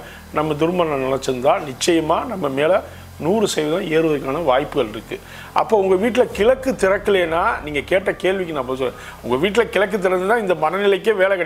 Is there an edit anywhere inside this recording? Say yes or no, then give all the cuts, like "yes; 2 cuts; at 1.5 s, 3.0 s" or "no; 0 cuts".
no; 0 cuts